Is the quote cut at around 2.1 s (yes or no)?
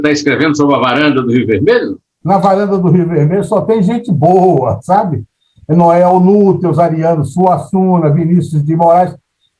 yes